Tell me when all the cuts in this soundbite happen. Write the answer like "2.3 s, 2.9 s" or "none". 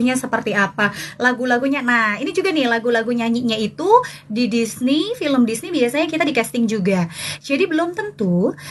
none